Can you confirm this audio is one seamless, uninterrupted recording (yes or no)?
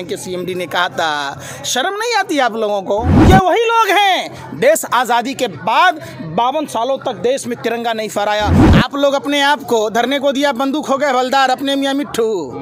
no